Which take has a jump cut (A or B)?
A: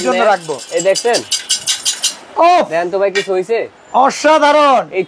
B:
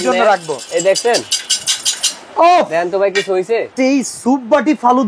B